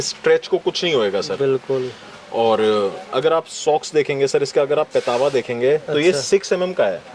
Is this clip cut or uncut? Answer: uncut